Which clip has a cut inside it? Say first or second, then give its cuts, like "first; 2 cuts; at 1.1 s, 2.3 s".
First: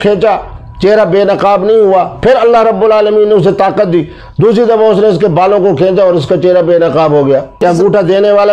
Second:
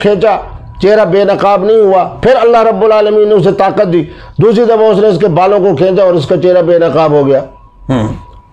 first; 1 cut; at 7.6 s